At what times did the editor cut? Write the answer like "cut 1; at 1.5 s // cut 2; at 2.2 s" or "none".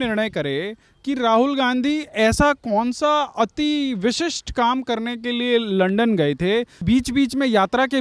cut 1; at 6.8 s